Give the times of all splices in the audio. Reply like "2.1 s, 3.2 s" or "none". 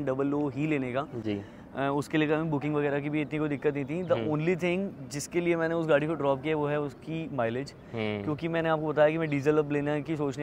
none